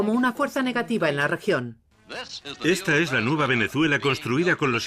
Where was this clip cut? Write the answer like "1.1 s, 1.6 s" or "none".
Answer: 1.0 s